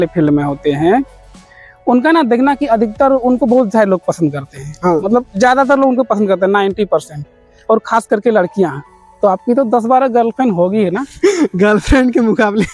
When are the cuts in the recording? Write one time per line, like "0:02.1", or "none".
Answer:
none